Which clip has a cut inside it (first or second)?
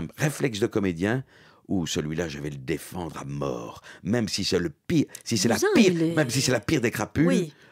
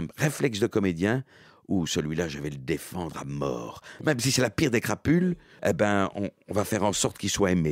second